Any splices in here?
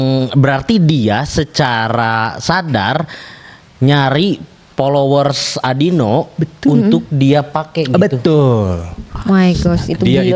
no; 0 cuts

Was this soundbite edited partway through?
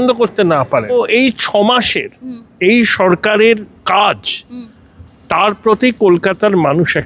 yes; 1 cut; at 0.9 s

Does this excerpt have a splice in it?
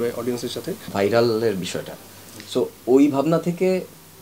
yes; 1 cut; at 0.9 s

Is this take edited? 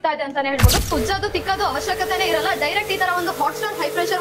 yes; 1 cut; at 0.9 s

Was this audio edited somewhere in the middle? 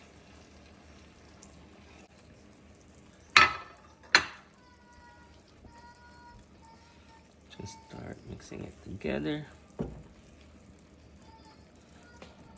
yes; 1 cut; at 2.1 s

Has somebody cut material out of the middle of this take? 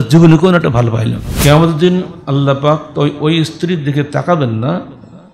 yes; 1 cut; at 1.2 s

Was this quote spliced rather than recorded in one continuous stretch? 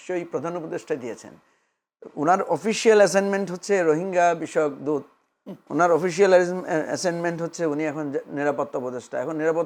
no; 0 cuts

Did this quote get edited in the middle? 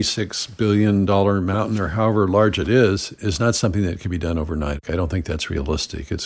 yes; 2 cuts; at 1.6 s, 4.8 s

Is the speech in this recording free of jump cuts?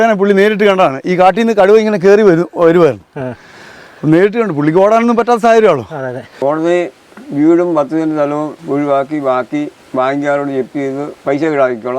no; 4 cuts; at 6.2 s, 8.6 s, 9.8 s, 11.1 s

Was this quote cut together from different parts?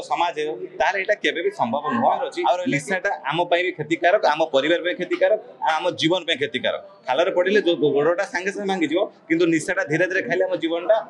yes; 1 cut; at 2.6 s

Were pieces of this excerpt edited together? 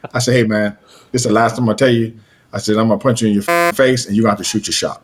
no; 0 cuts

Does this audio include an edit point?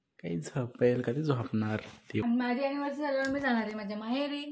yes; 1 cut; at 2.2 s

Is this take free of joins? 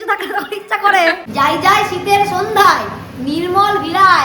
no; 1 cut; at 1.2 s

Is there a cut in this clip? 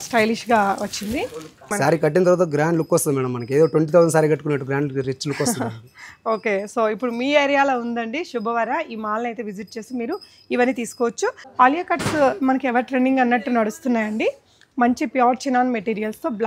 yes; 2 cuts; at 1.7 s, 11.4 s

